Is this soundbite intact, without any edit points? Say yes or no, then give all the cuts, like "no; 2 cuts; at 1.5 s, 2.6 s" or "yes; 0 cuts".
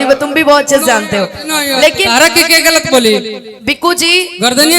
no; 1 cut; at 2.0 s